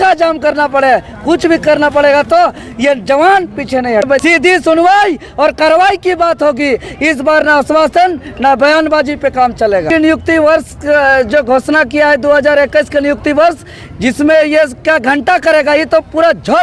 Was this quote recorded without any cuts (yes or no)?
no